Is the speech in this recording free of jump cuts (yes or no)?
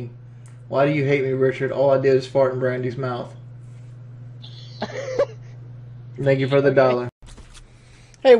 yes